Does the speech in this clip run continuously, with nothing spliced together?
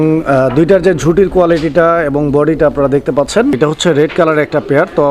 no; 1 cut; at 3.6 s

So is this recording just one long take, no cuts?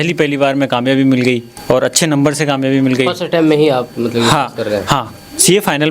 no; 1 cut; at 1.5 s

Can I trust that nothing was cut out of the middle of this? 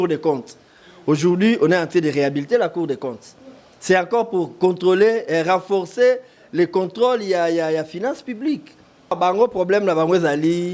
no; 1 cut; at 9.1 s

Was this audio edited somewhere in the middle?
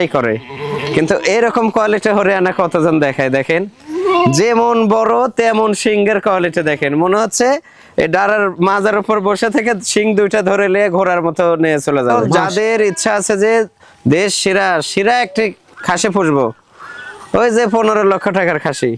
yes; 1 cut; at 12.2 s

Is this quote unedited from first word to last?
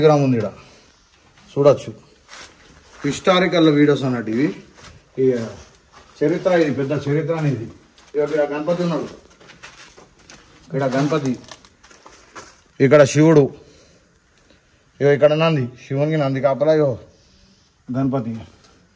yes; 0 cuts

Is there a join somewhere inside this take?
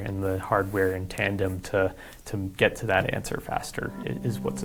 no; 0 cuts

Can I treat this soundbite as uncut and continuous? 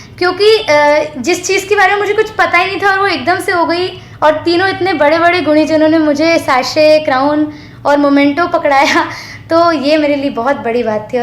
yes; 0 cuts

